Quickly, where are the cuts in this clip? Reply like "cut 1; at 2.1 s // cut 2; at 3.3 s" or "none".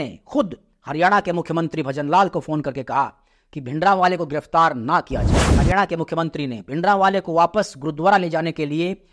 cut 1; at 5.5 s

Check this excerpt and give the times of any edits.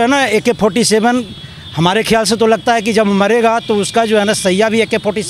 none

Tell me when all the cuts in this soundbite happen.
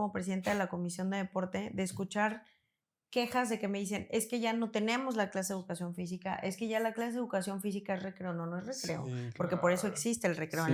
none

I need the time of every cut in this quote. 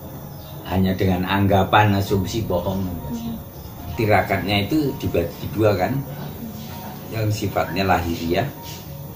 cut 1; at 3.8 s

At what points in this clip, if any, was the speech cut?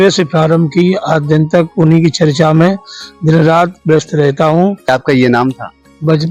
cut 1; at 4.9 s

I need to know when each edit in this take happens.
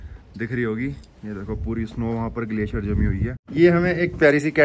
cut 1; at 3.4 s

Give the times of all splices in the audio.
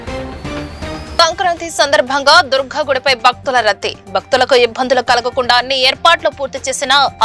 cut 1; at 1.1 s

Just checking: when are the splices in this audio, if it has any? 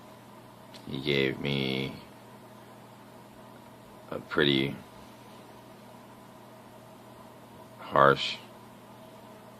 cut 1; at 4.4 s

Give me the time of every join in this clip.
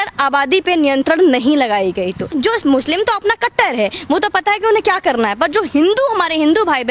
cut 1; at 2.3 s

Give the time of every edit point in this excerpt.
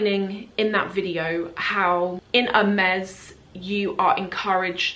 cut 1; at 2.2 s

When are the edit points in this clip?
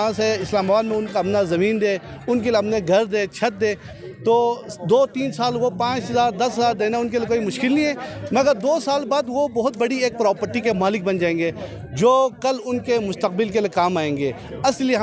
none

